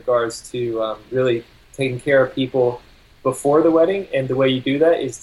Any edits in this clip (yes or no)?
no